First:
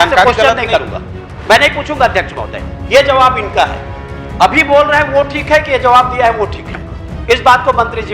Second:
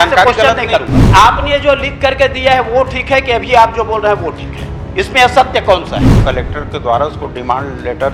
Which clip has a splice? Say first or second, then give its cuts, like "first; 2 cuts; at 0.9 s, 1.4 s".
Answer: second; 2 cuts; at 1.0 s, 6.2 s